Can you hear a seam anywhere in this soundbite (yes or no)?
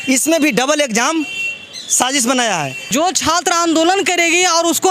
yes